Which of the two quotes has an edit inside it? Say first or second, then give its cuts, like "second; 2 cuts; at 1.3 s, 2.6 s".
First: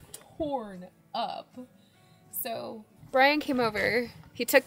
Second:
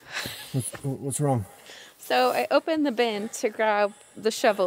first; 1 cut; at 2.9 s